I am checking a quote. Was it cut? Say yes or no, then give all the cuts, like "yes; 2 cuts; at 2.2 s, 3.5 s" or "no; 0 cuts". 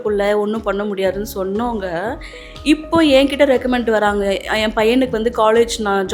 no; 0 cuts